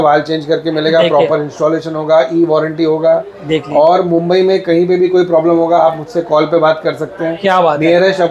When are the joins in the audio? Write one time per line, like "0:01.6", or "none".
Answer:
none